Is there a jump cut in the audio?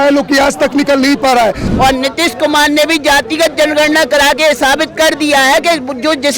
yes; 1 cut; at 1.6 s

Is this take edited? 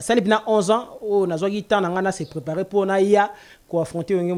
no; 0 cuts

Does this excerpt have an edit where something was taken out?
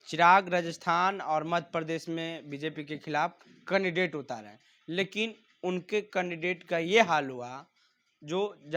no; 0 cuts

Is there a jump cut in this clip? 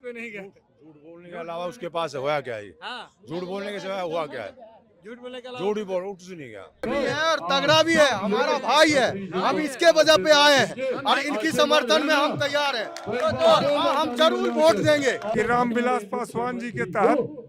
yes; 2 cuts; at 6.8 s, 15.2 s

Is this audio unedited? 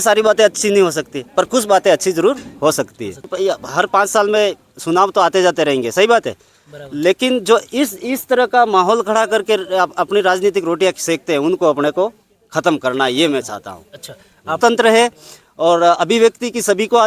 no; 2 cuts; at 3.3 s, 14.6 s

